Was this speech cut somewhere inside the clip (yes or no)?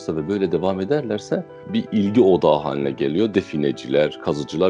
yes